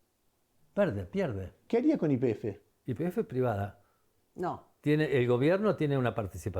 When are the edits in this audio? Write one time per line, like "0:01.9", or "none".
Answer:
0:01.6
0:02.7